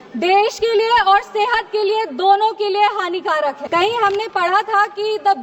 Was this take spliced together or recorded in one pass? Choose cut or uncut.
cut